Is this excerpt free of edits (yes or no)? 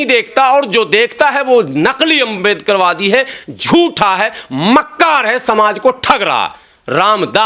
yes